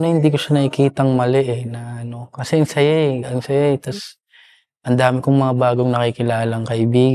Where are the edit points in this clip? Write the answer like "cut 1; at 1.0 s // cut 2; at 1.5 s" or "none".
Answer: none